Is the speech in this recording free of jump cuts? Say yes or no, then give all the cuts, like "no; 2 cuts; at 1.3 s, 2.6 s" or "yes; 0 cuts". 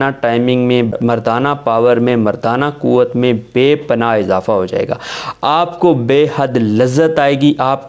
no; 1 cut; at 0.9 s